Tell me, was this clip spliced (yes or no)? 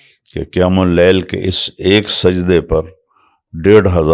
no